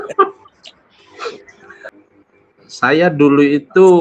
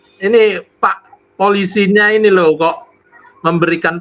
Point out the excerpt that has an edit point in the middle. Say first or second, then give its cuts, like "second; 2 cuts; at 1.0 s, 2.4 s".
first; 1 cut; at 1.9 s